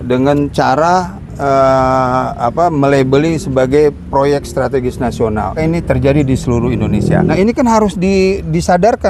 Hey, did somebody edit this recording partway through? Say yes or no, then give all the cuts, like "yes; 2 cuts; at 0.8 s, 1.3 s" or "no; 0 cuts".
yes; 2 cuts; at 5.6 s, 7.3 s